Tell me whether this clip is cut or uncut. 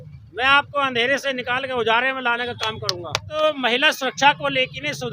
cut